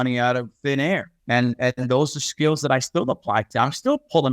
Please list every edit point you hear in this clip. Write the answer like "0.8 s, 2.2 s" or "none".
1.1 s